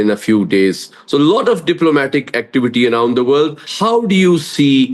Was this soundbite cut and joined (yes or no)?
yes